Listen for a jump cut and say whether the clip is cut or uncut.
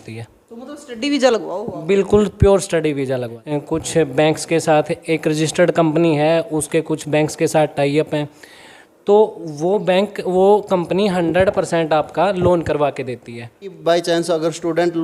cut